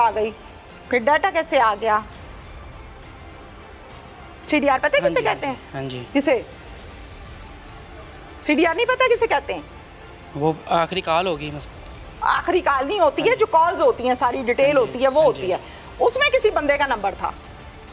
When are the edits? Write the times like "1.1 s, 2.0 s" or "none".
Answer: none